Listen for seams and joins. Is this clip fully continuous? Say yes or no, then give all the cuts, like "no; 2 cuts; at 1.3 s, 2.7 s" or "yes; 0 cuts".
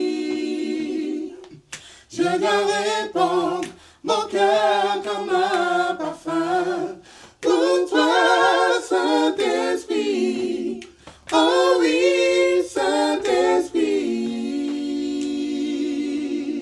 yes; 0 cuts